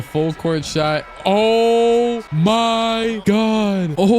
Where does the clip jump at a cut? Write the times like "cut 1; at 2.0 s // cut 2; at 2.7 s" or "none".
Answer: cut 1; at 2.3 s // cut 2; at 3.2 s